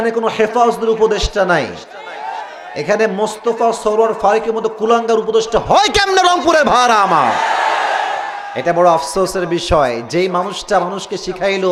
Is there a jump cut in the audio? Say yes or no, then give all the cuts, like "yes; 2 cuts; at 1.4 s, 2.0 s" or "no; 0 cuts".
no; 0 cuts